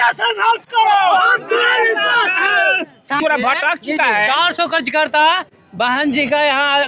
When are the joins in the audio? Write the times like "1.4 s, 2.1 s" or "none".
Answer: 3.2 s

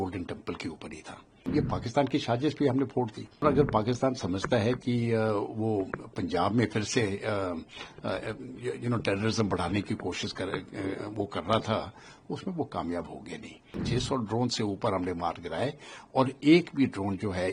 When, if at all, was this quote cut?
1.4 s, 3.4 s, 13.8 s

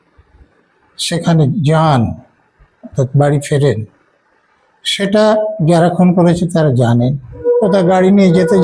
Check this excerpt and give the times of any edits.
7.4 s

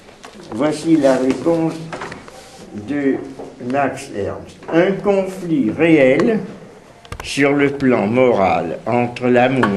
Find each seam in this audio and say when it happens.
2.9 s

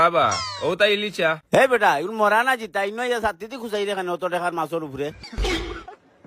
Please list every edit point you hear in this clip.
5.2 s

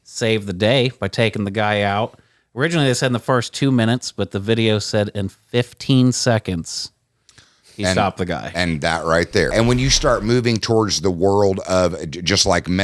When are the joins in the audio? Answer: 9.5 s

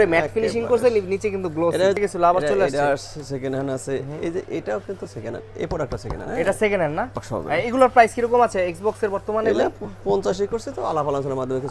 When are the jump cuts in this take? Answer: 2.0 s, 7.2 s

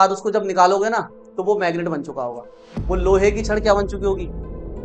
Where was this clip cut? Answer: none

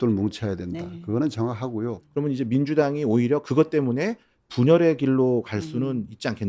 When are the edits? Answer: 2.0 s

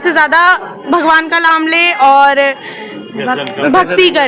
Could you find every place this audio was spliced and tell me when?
none

